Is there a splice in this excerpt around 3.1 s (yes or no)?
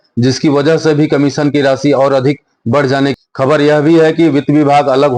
yes